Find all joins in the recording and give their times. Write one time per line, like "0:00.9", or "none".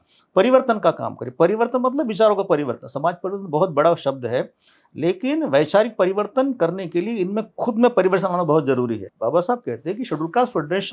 0:09.1

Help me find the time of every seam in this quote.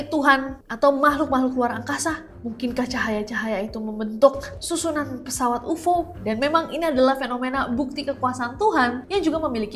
none

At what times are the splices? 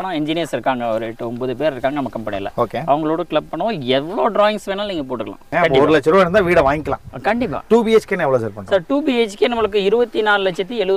0:05.5

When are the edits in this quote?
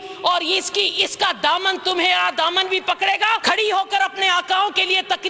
0:03.4

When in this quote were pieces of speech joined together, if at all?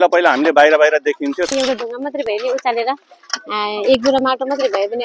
0:01.5

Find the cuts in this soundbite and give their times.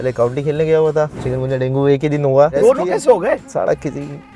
0:01.2
0:02.5
0:03.5

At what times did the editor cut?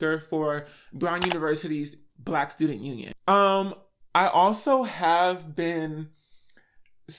0:03.1

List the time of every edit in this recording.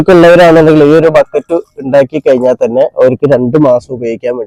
none

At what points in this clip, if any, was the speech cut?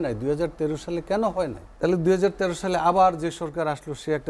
0:01.6

